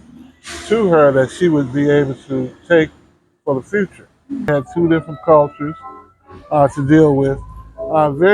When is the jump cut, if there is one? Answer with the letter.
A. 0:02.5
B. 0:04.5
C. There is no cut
B